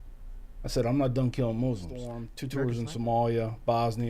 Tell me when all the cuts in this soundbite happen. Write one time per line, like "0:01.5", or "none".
0:02.3